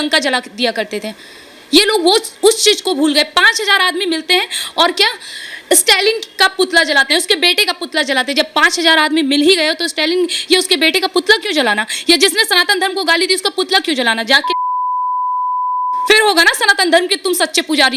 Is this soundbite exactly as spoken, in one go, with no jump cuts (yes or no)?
yes